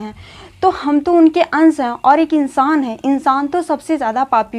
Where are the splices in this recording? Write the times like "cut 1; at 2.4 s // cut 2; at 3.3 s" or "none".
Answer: none